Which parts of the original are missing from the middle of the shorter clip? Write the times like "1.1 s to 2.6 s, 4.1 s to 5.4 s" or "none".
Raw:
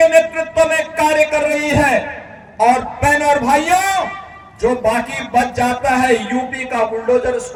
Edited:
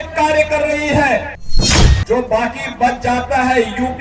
2.4 s to 4.2 s